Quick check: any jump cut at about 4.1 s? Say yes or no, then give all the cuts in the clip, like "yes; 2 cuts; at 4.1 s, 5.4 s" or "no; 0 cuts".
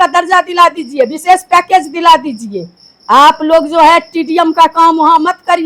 no; 0 cuts